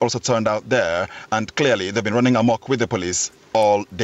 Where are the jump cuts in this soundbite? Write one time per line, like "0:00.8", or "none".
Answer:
none